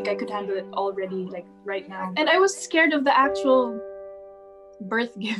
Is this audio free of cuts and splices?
no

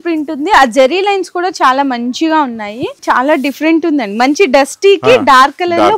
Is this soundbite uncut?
no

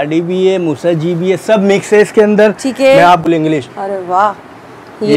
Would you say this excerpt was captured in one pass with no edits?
no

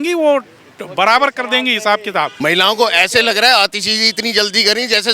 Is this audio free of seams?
no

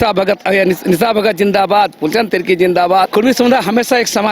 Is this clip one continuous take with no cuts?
no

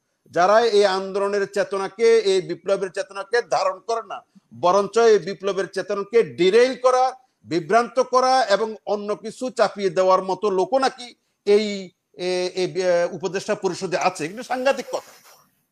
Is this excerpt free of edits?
yes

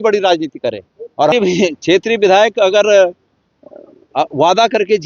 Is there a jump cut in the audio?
yes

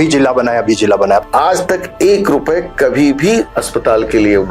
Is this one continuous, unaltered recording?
no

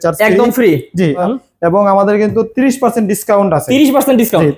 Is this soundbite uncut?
no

